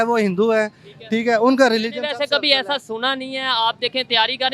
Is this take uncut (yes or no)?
yes